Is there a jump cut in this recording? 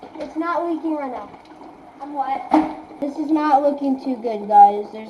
yes; 1 cut; at 3.1 s

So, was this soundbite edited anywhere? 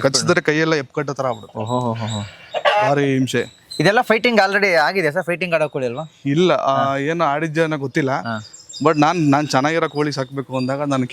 no; 0 cuts

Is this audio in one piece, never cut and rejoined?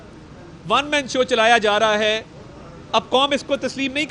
yes; 0 cuts

